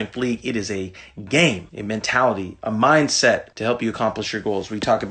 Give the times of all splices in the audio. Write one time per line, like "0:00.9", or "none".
0:01.7
0:03.5